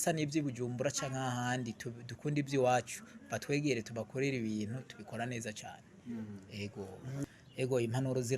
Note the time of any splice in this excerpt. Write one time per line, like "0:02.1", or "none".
0:07.4